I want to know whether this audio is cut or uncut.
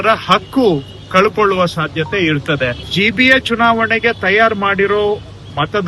cut